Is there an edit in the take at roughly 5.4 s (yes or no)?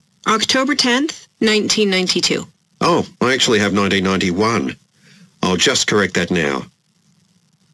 no